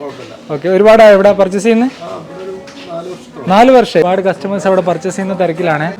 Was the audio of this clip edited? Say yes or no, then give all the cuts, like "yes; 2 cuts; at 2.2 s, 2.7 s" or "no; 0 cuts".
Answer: yes; 1 cut; at 4.0 s